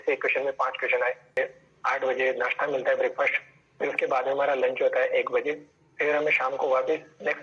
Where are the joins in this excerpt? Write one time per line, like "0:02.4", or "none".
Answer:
0:01.4